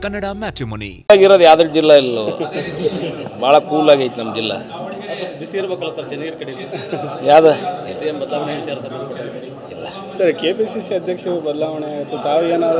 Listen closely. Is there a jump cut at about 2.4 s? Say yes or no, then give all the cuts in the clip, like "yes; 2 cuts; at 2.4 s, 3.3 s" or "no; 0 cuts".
no; 1 cut; at 1.1 s